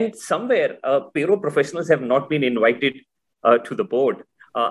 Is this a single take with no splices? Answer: yes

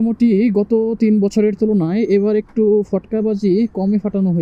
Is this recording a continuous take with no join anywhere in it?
yes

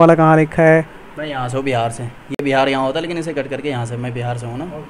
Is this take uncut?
yes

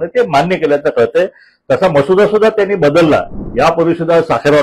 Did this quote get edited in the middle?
yes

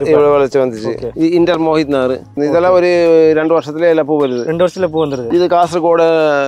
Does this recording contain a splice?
yes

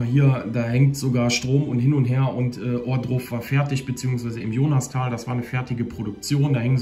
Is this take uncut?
yes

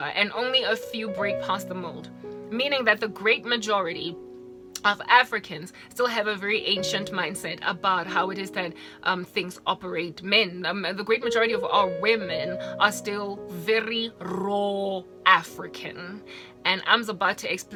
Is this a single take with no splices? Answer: yes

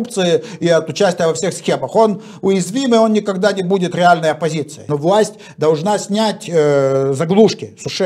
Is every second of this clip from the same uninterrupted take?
no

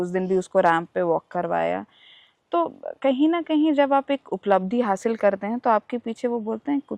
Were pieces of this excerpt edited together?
no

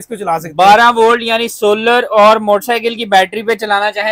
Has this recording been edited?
no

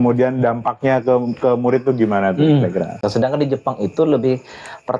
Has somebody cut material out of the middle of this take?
yes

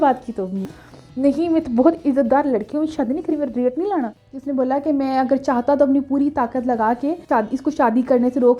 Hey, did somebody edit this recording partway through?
yes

